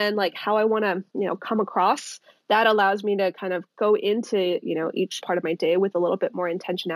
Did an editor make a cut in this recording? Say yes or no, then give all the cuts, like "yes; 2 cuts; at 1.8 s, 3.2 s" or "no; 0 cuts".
yes; 2 cuts; at 2.3 s, 5.2 s